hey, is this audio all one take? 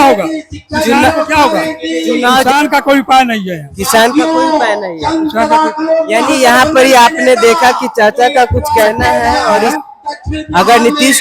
no; 2 cuts; at 2.4 s, 9.6 s

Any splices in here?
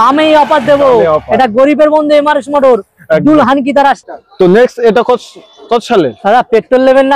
no; 0 cuts

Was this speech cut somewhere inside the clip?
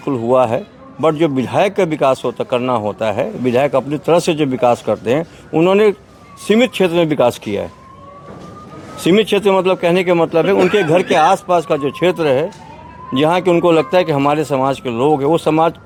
no; 0 cuts

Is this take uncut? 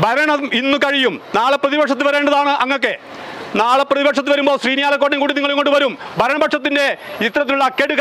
yes; 0 cuts

